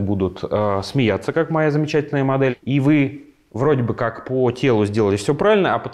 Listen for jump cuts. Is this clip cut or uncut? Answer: cut